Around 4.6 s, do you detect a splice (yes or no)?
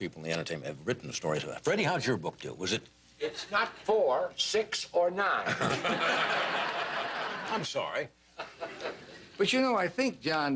no